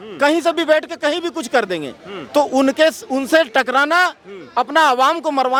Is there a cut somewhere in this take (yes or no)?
no